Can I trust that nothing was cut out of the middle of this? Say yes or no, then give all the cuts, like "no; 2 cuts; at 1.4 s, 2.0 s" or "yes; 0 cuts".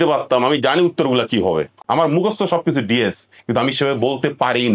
no; 1 cut; at 1.8 s